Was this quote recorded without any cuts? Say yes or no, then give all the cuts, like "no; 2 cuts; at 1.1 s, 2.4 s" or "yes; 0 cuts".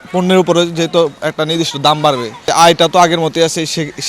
no; 1 cut; at 2.5 s